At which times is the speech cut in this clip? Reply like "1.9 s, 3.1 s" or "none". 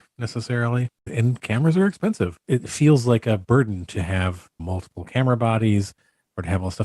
1.1 s, 2.4 s